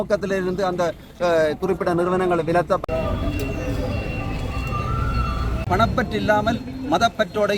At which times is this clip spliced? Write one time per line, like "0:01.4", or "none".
0:02.8
0:05.6